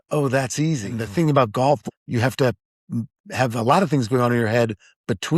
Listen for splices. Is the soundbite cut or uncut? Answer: cut